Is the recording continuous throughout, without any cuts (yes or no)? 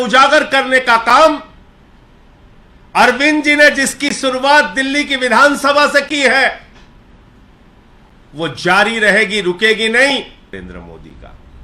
no